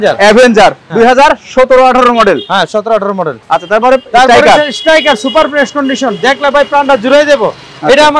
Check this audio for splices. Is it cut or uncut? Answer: uncut